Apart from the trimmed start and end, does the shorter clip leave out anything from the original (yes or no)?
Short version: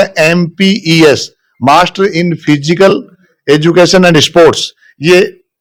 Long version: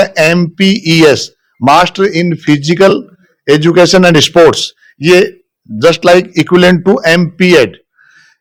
no